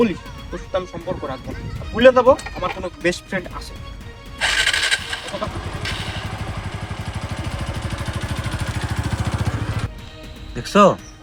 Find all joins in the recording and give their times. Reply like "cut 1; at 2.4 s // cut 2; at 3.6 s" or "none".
none